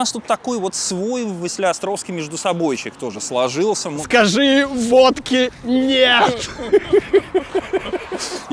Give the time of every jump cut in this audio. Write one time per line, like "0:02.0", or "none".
0:04.0